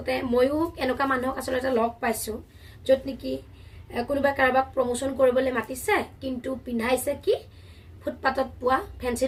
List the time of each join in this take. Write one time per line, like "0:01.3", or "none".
none